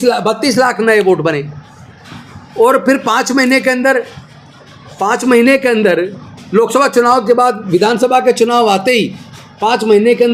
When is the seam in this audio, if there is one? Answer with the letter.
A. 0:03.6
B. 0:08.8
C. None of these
C